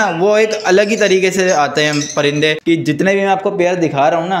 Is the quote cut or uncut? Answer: cut